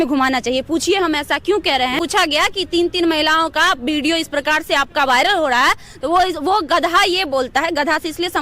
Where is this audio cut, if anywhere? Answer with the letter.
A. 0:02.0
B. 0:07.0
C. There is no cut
A